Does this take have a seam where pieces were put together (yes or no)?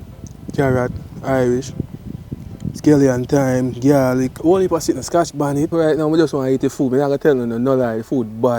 yes